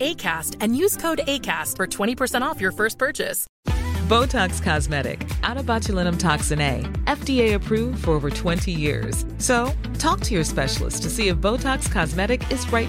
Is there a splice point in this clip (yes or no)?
yes